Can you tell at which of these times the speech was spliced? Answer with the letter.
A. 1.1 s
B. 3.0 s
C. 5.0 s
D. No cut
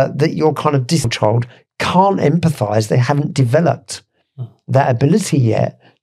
A